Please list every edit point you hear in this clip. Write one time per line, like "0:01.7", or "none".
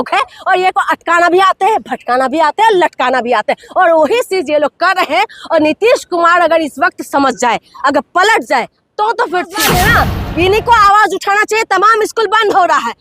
0:09.6